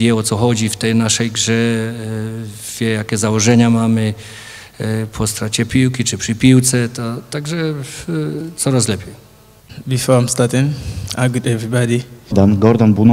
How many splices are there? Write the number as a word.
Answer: zero